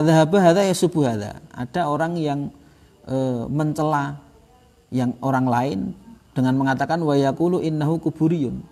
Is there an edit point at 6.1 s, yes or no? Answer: no